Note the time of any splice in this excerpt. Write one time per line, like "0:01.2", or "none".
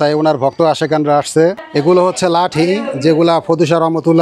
0:01.6